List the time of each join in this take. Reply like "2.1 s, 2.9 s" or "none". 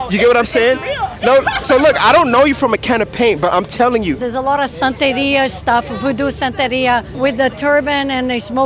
4.2 s